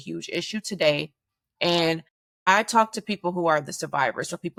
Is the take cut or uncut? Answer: uncut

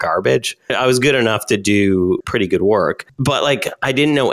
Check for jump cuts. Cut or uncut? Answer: cut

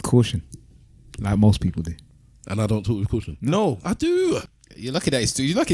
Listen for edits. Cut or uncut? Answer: cut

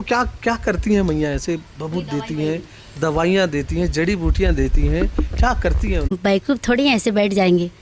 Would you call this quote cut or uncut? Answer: cut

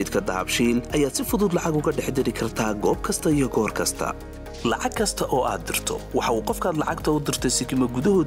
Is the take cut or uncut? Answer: uncut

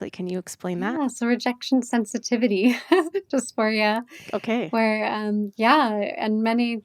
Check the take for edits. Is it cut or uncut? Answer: uncut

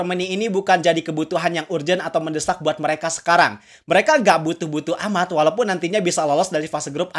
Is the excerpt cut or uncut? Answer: uncut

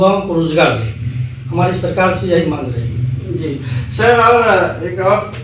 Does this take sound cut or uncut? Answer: uncut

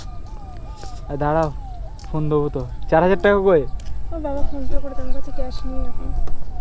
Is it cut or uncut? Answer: uncut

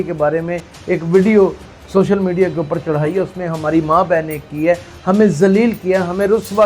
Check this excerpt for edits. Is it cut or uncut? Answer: uncut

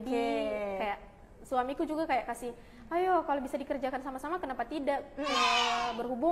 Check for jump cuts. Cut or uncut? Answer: uncut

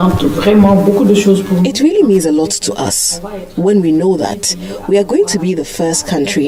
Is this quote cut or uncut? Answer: uncut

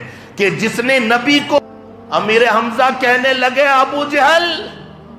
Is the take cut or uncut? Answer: cut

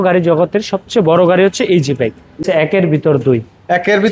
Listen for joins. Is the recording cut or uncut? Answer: cut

